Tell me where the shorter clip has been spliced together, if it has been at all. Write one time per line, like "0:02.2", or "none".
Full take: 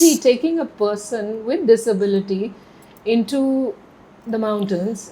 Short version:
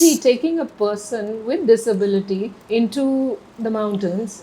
0:02.5
0:03.5